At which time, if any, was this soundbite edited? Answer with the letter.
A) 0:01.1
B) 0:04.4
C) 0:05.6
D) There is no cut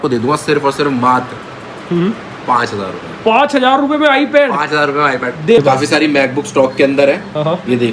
C